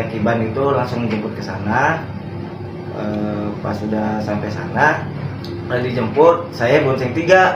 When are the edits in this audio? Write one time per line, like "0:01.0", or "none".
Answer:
none